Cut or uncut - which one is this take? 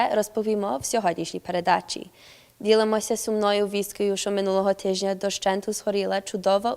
cut